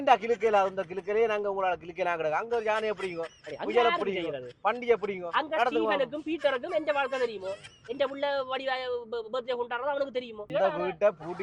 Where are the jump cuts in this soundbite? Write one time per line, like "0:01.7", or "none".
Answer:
0:10.4